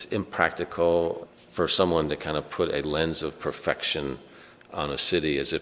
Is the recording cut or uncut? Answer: cut